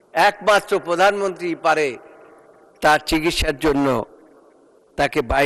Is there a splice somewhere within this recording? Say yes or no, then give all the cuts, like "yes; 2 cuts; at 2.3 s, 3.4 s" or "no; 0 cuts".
no; 0 cuts